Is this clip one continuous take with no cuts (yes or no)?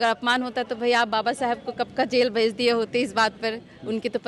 yes